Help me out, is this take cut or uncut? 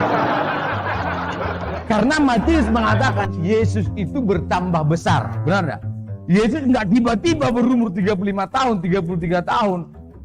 uncut